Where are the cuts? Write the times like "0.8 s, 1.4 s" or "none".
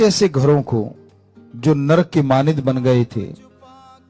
none